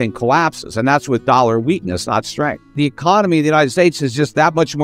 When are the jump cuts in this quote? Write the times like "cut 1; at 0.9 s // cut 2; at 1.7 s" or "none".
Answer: cut 1; at 2.7 s